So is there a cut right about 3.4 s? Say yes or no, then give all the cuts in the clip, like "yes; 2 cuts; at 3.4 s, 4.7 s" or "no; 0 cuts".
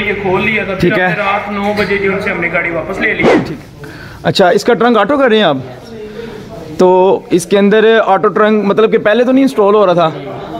yes; 1 cut; at 3.4 s